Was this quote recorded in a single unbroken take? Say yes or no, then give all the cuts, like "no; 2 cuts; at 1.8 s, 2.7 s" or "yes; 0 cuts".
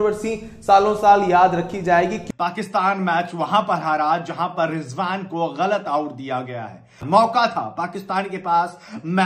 no; 2 cuts; at 2.2 s, 7.0 s